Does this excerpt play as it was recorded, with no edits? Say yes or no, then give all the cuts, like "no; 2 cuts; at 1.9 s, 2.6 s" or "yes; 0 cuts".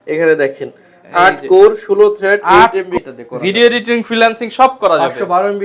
no; 1 cut; at 2.9 s